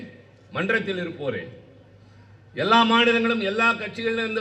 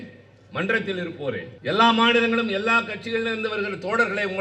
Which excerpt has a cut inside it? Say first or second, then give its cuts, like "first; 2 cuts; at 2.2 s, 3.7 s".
second; 1 cut; at 1.5 s